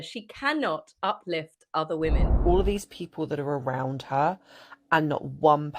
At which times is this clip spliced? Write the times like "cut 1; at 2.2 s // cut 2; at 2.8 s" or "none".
cut 1; at 2.3 s